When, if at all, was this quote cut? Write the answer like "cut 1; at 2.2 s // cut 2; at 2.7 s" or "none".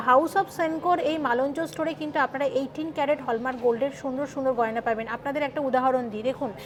none

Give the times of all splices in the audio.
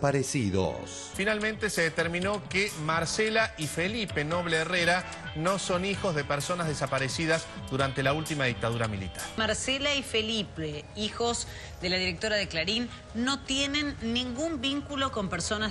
cut 1; at 1.1 s // cut 2; at 9.4 s

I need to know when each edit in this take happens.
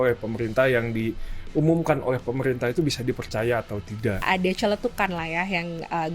cut 1; at 4.2 s

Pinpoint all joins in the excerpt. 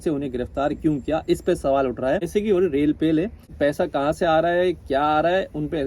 cut 1; at 2.3 s // cut 2; at 3.5 s

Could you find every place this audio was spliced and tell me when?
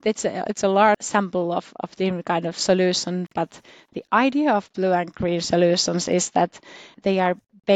cut 1; at 1.0 s // cut 2; at 7.0 s

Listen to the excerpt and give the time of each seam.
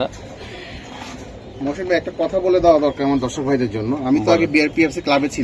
none

